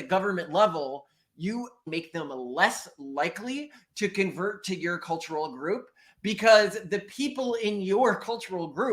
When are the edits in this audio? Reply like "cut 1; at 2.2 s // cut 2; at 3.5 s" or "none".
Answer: cut 1; at 1.9 s